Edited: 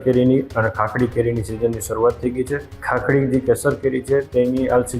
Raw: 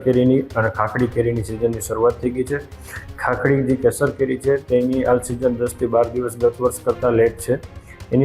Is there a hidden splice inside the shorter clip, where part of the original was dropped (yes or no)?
yes